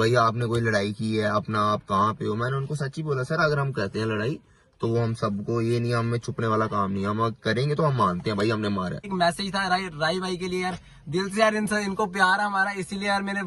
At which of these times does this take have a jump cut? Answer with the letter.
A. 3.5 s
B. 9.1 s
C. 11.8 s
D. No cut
B